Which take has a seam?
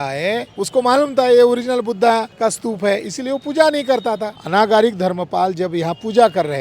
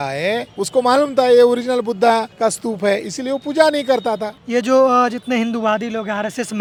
first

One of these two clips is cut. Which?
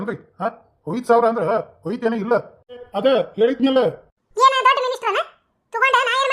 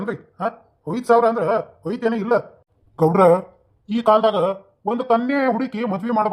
first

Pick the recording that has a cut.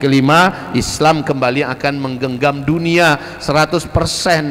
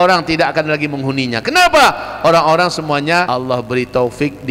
second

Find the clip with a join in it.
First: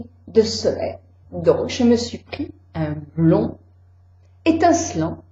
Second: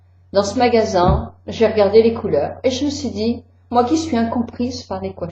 second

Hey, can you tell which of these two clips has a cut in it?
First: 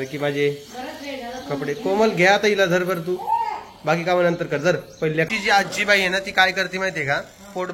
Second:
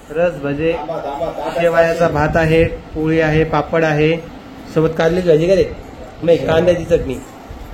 first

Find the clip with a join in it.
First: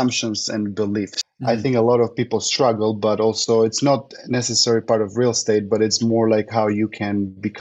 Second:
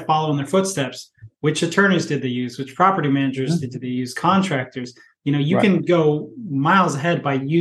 first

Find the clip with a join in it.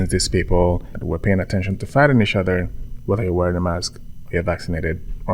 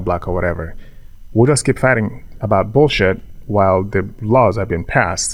first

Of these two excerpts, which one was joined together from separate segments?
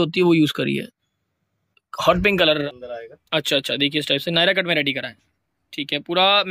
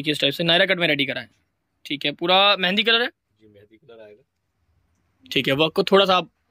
first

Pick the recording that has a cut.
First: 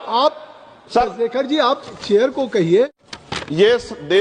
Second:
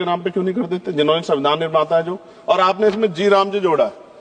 first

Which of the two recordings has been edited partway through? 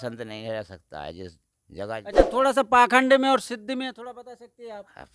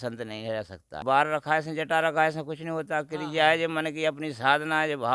second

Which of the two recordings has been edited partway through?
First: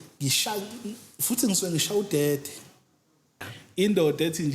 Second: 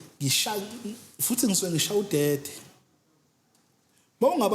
first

